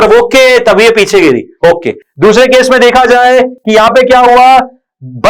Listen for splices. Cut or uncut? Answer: uncut